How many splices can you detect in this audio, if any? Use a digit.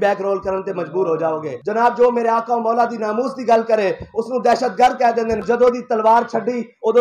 2